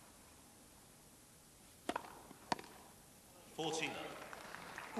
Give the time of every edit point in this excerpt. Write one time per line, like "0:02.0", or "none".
none